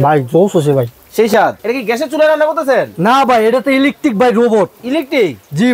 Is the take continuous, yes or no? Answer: no